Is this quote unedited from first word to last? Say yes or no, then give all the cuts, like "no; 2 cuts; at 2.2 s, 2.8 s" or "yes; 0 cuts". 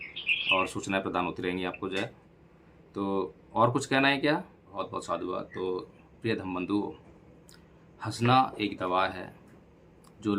no; 1 cut; at 4.6 s